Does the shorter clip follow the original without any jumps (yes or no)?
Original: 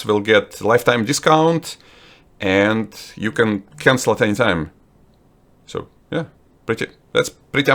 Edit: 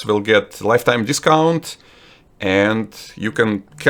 yes